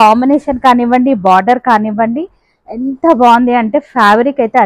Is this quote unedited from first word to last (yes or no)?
yes